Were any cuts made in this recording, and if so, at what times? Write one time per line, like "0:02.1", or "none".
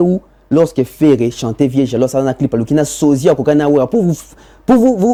none